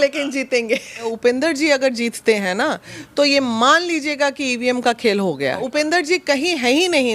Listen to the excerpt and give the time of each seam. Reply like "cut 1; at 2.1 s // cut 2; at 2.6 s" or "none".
cut 1; at 1.1 s // cut 2; at 5.6 s